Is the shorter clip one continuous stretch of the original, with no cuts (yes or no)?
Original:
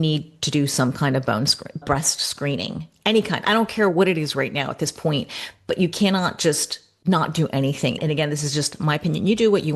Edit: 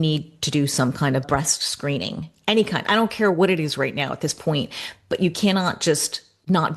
no